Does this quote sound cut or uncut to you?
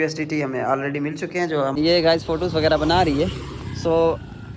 cut